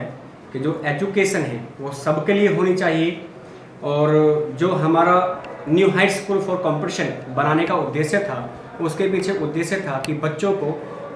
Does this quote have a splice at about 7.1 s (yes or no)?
no